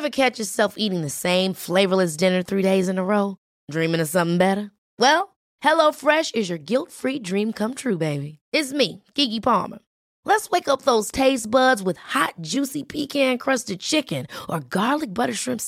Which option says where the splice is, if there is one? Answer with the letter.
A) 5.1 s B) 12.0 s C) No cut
C